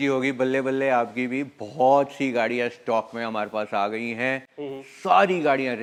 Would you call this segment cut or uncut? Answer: uncut